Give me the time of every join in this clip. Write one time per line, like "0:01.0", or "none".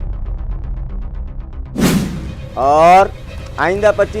0:02.2